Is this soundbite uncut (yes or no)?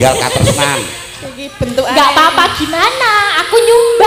yes